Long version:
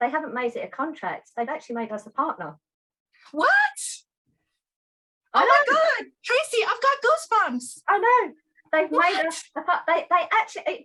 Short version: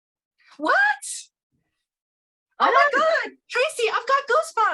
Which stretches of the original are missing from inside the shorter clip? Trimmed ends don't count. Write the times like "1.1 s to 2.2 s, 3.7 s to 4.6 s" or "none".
none